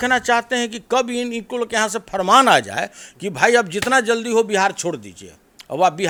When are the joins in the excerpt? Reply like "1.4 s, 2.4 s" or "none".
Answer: none